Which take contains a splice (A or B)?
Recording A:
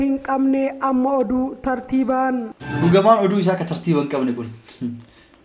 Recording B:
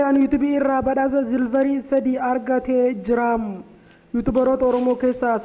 A